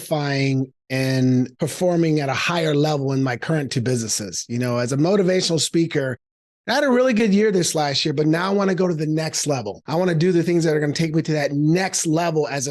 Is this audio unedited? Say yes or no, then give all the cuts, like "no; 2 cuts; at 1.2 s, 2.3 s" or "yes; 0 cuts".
no; 2 cuts; at 1.5 s, 9.8 s